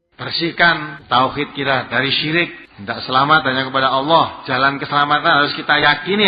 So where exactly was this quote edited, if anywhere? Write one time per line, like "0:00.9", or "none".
0:00.9
0:02.7